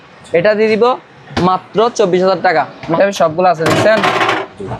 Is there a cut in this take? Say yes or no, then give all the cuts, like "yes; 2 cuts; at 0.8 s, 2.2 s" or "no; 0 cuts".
yes; 1 cut; at 2.9 s